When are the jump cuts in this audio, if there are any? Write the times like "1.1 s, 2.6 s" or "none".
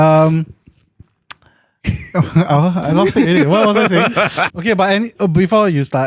4.4 s